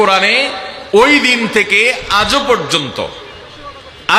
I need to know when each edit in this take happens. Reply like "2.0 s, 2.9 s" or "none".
none